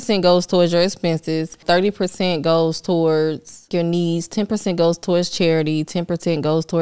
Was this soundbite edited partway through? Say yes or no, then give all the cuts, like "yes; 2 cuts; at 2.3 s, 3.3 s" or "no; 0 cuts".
yes; 2 cuts; at 1.6 s, 3.7 s